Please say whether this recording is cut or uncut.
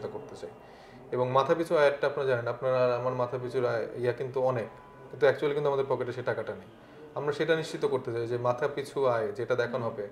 uncut